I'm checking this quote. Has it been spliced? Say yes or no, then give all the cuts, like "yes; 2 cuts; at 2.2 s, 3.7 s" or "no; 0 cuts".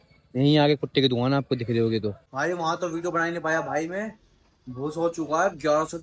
yes; 1 cut; at 2.3 s